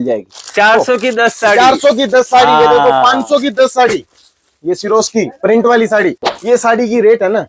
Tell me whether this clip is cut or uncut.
cut